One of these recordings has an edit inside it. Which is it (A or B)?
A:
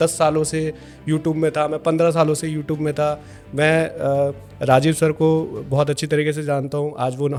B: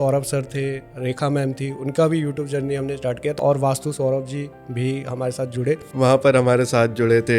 B